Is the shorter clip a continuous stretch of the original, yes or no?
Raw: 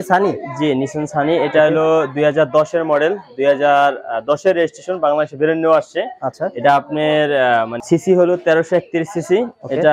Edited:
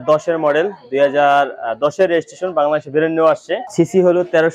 no